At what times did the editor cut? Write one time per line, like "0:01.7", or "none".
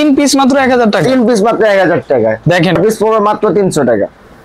0:02.8